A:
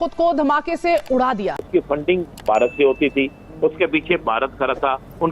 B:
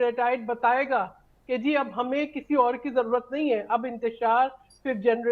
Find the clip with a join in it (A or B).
A